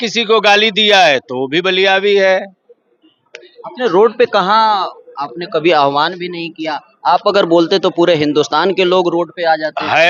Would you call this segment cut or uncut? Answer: uncut